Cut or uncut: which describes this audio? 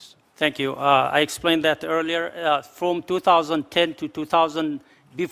uncut